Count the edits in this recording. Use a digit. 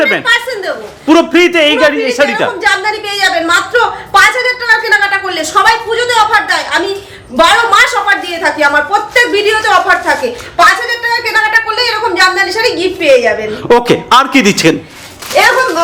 0